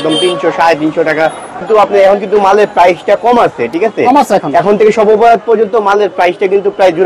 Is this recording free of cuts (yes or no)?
no